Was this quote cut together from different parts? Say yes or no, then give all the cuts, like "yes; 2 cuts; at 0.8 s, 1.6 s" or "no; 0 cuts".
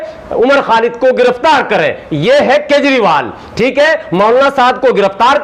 no; 0 cuts